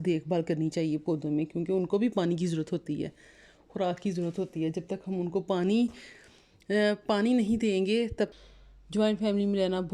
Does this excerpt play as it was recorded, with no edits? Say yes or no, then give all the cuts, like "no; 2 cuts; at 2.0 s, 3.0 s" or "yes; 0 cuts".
no; 1 cut; at 8.3 s